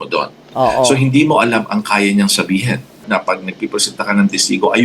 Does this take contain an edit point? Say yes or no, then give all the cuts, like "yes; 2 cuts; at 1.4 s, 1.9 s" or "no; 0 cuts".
yes; 1 cut; at 3.0 s